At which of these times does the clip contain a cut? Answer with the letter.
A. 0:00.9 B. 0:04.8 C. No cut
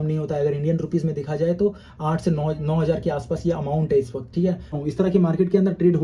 B